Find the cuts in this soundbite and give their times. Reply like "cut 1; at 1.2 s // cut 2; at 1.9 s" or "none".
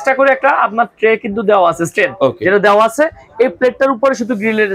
none